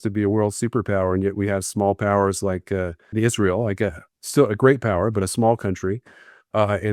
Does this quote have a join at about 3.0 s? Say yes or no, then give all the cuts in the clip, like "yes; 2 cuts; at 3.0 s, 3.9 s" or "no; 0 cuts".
yes; 1 cut; at 3.0 s